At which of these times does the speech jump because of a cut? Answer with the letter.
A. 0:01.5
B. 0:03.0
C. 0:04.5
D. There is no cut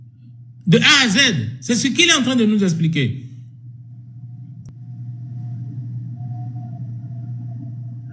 C